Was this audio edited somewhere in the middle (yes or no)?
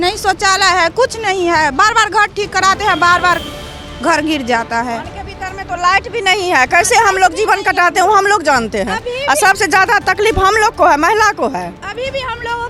no